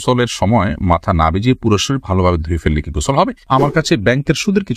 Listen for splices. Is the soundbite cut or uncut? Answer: cut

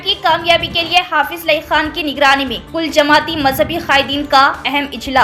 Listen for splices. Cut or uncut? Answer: uncut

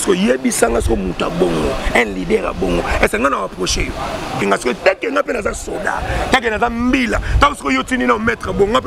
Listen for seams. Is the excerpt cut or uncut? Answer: cut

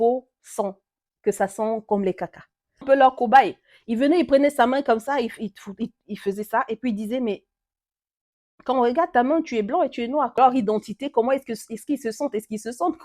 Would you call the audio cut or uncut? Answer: cut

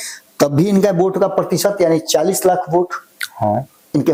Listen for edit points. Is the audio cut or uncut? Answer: uncut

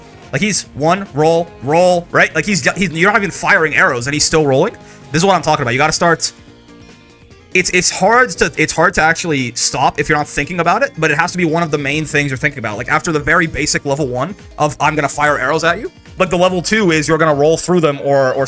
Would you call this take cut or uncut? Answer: uncut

